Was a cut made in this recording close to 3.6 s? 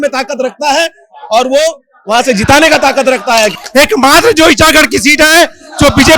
yes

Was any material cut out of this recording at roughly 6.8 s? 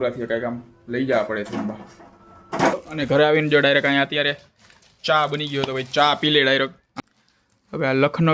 yes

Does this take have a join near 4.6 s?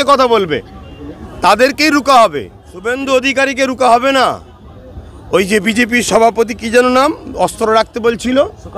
no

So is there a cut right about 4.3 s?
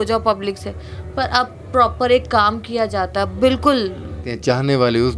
yes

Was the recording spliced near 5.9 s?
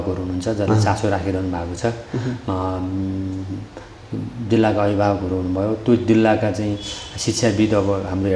no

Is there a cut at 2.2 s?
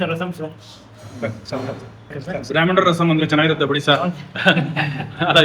yes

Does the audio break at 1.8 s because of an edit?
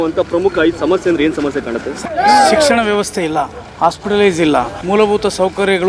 yes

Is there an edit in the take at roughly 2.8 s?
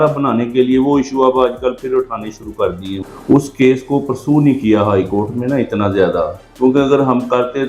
yes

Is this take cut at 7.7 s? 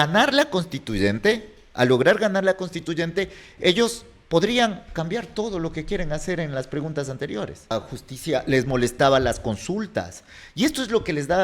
yes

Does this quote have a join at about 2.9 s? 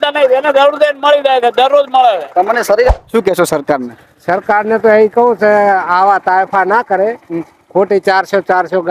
yes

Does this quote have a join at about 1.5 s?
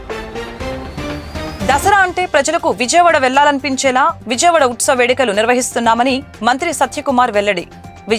yes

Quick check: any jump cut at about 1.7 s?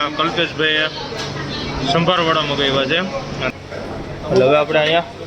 no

